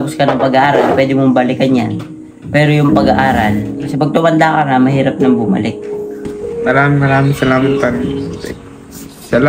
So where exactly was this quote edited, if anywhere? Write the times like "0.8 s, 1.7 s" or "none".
6.5 s